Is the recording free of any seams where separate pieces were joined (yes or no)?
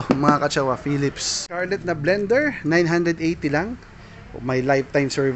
no